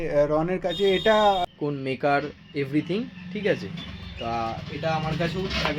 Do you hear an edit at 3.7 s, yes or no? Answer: no